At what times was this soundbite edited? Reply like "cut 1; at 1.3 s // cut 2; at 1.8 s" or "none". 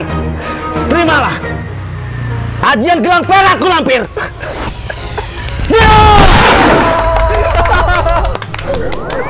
none